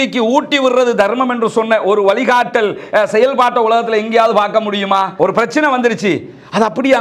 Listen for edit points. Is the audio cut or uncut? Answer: cut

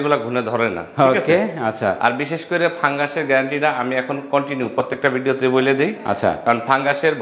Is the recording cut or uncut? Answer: uncut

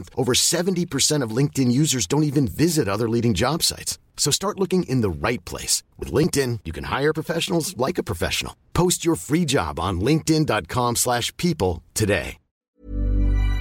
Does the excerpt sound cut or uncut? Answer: cut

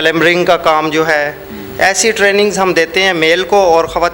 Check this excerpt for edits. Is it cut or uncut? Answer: uncut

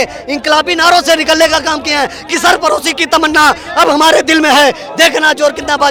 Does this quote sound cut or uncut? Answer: uncut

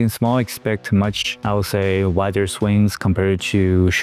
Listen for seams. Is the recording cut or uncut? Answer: uncut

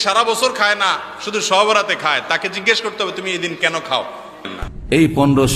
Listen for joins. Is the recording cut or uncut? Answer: cut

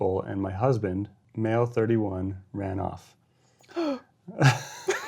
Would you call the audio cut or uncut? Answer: cut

